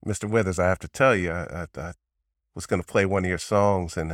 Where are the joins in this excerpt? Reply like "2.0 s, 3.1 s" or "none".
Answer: none